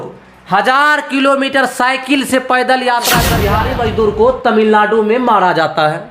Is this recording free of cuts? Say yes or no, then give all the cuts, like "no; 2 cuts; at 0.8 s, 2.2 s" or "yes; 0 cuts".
no; 1 cut; at 3.4 s